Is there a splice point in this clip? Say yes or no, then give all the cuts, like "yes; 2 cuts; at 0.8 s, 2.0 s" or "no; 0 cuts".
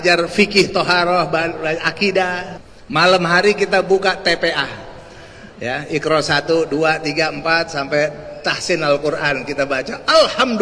yes; 1 cut; at 2.5 s